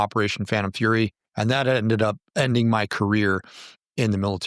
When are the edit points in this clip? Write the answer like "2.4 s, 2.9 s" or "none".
1.2 s, 2.2 s